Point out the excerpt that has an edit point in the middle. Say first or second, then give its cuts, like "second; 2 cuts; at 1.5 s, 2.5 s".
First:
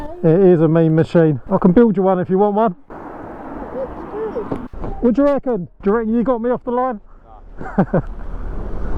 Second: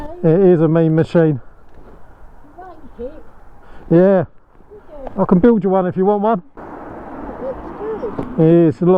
first; 2 cuts; at 1.4 s, 4.6 s